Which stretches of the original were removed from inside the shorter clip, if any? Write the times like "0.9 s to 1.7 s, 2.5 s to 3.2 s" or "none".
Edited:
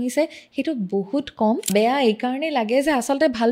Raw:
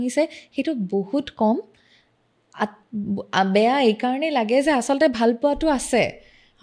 1.7 s to 3.5 s